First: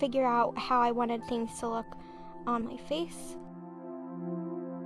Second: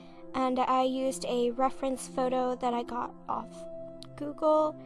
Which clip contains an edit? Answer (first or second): second